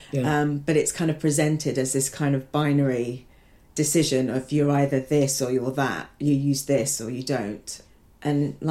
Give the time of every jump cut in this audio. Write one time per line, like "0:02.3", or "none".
none